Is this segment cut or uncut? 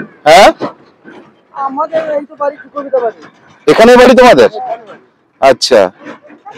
uncut